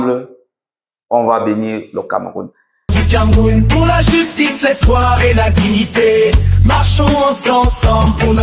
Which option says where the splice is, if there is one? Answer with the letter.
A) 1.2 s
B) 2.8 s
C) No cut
B